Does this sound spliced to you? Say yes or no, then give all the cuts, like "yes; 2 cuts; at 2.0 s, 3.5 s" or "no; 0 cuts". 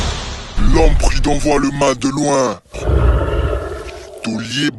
no; 0 cuts